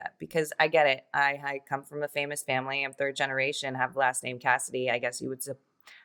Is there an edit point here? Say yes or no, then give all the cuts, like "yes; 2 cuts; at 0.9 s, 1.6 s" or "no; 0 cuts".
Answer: no; 0 cuts